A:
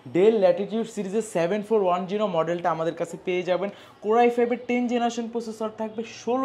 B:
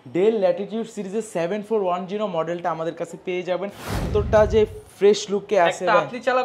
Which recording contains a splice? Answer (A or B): B